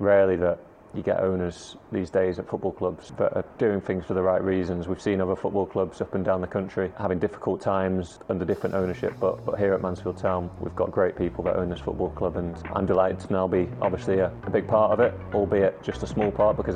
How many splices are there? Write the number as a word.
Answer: six